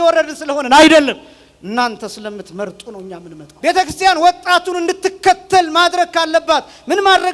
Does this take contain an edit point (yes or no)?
yes